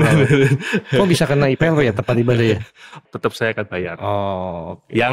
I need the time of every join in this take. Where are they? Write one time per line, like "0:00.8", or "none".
0:02.9